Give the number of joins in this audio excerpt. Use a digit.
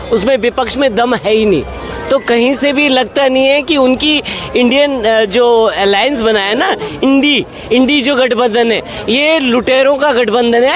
0